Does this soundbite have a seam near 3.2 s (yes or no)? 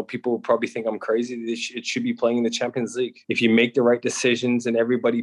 yes